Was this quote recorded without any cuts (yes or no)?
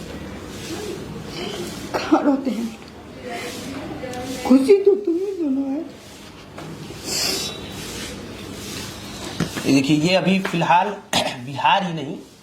yes